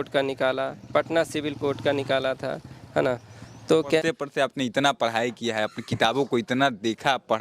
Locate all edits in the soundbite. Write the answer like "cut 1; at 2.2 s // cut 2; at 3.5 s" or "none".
cut 1; at 4.0 s